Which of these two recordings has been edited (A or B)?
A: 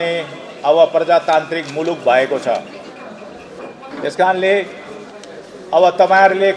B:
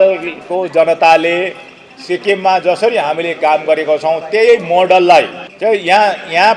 B